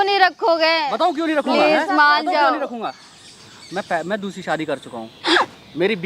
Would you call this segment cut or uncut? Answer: uncut